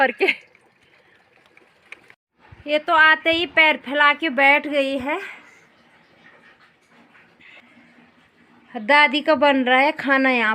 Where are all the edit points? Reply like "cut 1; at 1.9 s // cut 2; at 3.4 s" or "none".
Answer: cut 1; at 2.2 s